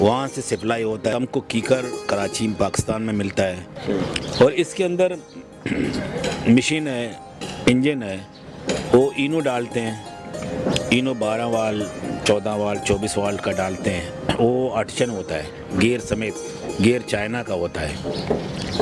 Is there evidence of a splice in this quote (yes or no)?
no